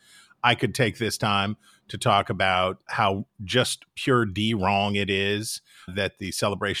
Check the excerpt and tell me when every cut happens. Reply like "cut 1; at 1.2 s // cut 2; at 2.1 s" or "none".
cut 1; at 2.9 s // cut 2; at 5.9 s